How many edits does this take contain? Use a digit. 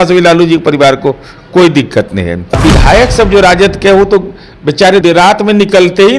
1